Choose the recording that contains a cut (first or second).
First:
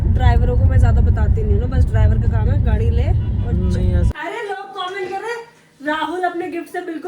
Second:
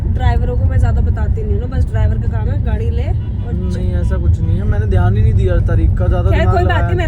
first